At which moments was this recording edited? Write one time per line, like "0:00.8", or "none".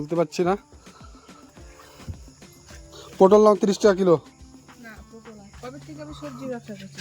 0:05.5